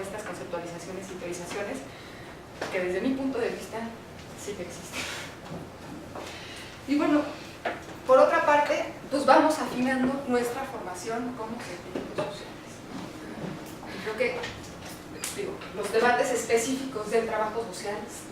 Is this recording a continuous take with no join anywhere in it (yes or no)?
no